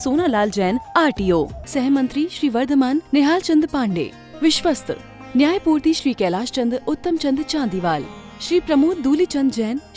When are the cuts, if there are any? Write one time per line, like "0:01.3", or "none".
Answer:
none